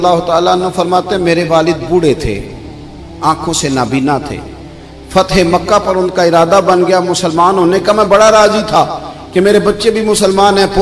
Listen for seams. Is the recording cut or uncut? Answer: uncut